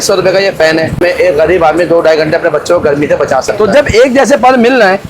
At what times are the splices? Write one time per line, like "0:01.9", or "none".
0:01.0
0:03.5

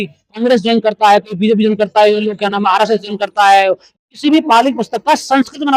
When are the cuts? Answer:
0:04.0

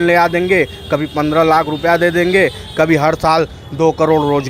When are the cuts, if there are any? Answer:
none

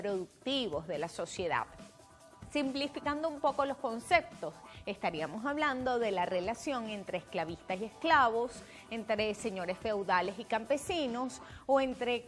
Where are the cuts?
none

